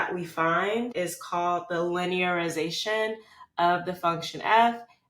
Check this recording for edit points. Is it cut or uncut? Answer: cut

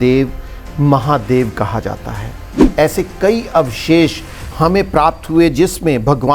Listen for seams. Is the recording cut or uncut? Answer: cut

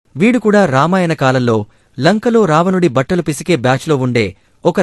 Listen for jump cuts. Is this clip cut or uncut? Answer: uncut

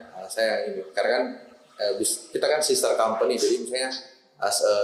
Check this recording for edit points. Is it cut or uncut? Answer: uncut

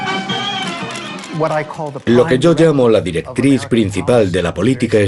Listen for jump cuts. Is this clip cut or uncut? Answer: uncut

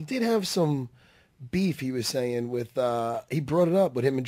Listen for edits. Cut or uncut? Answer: cut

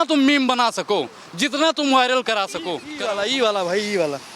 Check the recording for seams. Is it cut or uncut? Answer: cut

